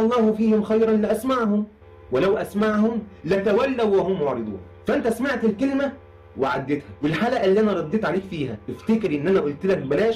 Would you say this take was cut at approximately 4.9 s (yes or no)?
no